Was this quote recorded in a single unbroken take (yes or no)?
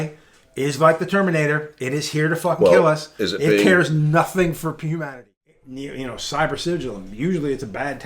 no